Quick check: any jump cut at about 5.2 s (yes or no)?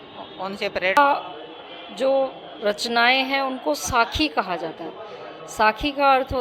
no